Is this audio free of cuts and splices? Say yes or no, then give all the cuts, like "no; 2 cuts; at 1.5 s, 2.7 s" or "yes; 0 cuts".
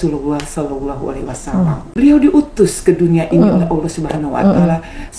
no; 1 cut; at 2.0 s